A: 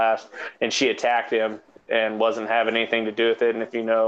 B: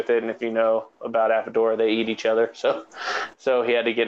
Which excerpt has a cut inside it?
A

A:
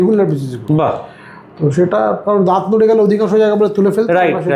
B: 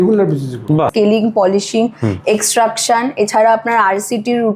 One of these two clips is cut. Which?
B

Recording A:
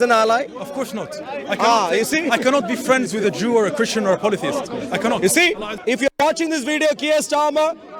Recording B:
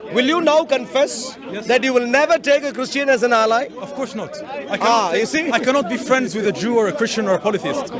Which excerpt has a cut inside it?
A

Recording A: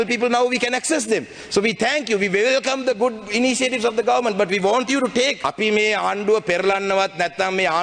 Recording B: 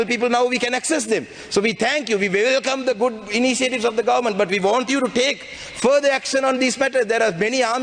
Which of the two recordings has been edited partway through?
A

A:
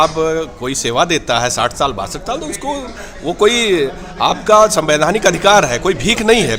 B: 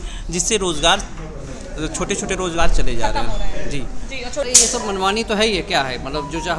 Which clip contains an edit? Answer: B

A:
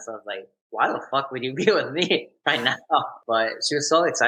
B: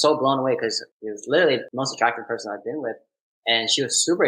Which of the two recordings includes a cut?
B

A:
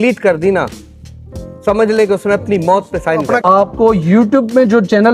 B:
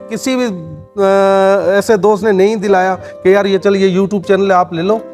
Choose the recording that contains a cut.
A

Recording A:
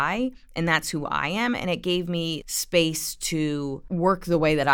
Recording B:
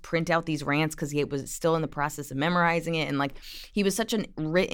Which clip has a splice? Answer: A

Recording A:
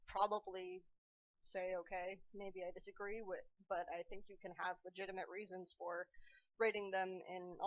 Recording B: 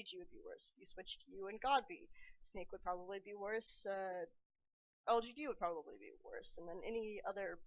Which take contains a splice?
B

